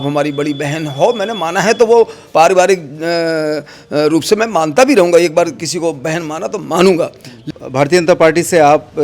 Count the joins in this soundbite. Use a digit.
1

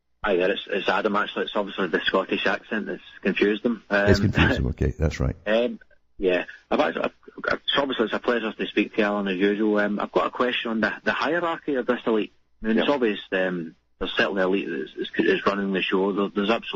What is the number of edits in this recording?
0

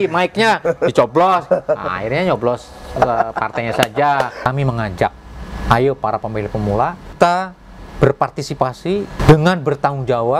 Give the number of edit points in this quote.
3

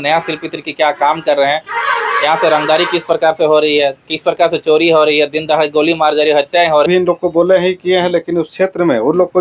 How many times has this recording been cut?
1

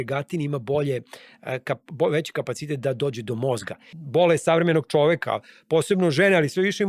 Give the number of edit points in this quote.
1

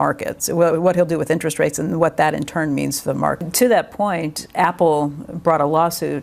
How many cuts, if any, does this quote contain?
1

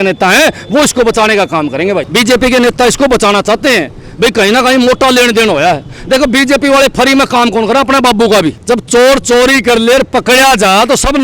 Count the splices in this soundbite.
2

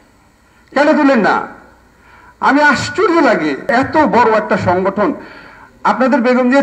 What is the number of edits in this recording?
1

